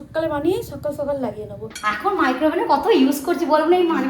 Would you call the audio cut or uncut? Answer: cut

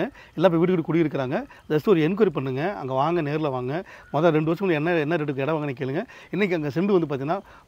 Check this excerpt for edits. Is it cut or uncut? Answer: uncut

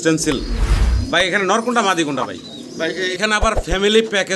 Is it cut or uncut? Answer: cut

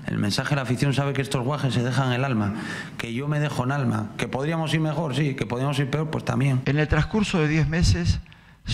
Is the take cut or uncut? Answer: cut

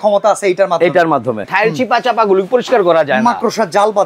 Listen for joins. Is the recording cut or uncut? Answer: cut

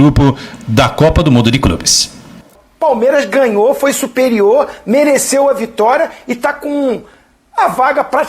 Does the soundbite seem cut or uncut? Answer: cut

